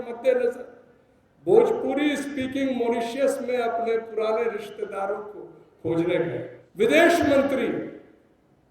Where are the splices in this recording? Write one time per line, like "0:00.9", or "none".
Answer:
0:06.6